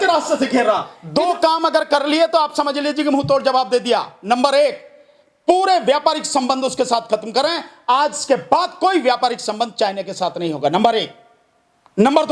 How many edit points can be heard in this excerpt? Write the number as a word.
one